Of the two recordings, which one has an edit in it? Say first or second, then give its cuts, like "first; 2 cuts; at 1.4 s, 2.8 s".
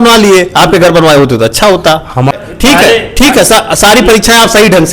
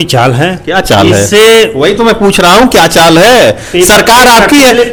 first; 1 cut; at 2.3 s